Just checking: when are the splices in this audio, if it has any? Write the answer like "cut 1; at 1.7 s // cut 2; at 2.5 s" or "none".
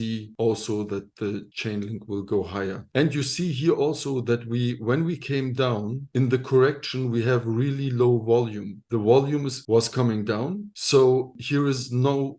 none